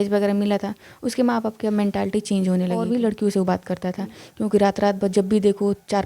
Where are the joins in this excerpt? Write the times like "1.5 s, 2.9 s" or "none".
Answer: 2.8 s